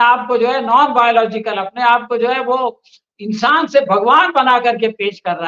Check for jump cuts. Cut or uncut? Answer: uncut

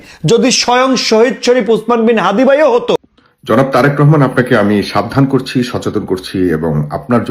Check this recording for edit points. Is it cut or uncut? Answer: cut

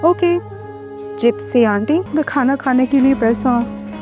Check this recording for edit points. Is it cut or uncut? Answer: cut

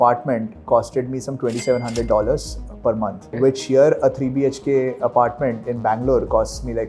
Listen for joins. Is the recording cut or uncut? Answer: uncut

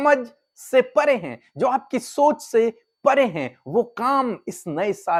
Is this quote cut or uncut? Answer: uncut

